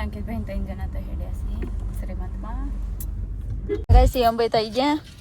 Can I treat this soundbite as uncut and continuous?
no; 1 cut; at 3.8 s

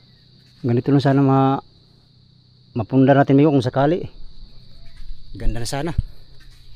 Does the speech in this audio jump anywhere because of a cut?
no; 0 cuts

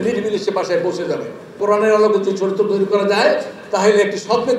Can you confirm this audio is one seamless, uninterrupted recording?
no; 1 cut; at 1.6 s

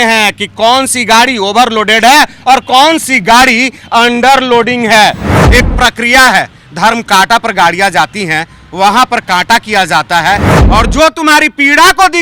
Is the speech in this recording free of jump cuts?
no; 2 cuts; at 5.4 s, 10.5 s

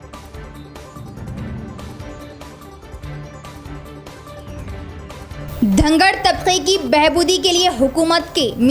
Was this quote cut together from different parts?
yes; 1 cut; at 1.7 s

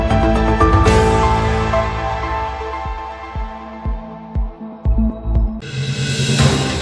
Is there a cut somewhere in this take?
yes; 1 cut; at 5.7 s

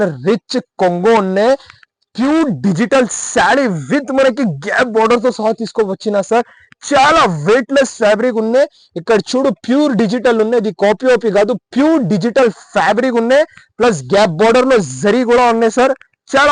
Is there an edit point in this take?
no; 0 cuts

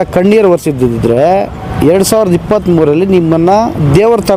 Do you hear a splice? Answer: no; 0 cuts

